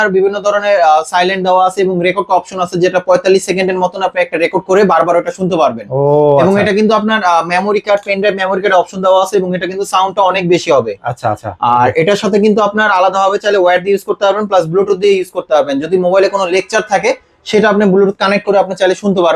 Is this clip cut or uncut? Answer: uncut